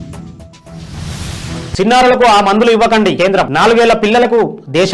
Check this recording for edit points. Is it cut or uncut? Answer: cut